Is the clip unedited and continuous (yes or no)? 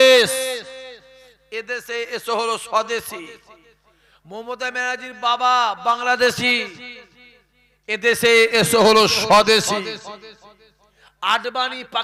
yes